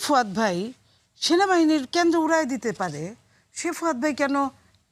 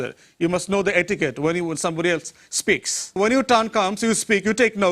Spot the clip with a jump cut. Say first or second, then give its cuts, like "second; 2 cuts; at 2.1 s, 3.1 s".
second; 1 cut; at 3.2 s